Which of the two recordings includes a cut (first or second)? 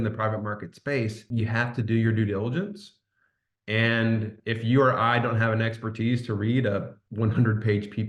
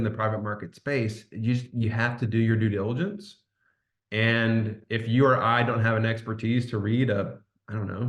first